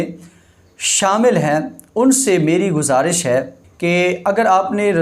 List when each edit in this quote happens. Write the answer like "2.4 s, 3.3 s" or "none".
3.6 s